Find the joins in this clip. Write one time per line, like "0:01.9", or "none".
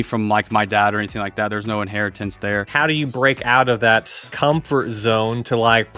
0:02.7
0:04.3